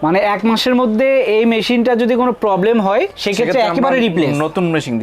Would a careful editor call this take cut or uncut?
uncut